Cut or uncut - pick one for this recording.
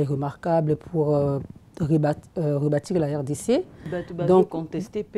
cut